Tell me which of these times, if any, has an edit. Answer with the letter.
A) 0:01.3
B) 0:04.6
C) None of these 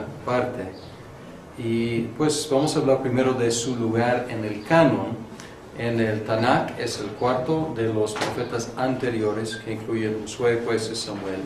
B